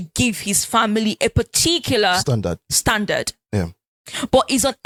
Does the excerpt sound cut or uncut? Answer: uncut